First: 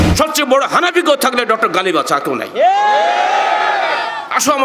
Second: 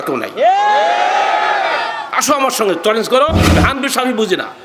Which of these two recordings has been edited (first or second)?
second